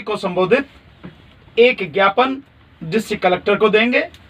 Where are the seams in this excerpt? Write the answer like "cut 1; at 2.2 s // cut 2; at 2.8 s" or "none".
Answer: none